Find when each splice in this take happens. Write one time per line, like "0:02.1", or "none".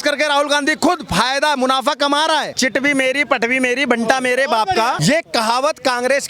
0:02.5
0:05.0